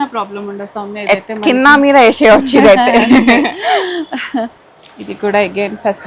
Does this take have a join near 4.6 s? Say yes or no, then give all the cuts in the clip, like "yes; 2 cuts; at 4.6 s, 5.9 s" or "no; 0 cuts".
yes; 1 cut; at 4.6 s